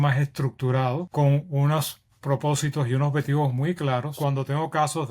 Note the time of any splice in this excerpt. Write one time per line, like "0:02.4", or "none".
0:01.1
0:04.1